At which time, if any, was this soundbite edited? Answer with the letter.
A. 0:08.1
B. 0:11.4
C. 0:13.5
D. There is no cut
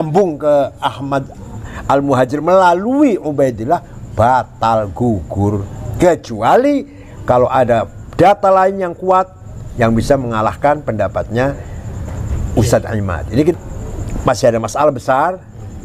C